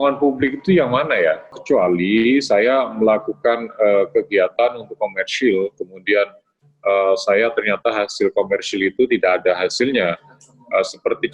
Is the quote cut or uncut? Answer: cut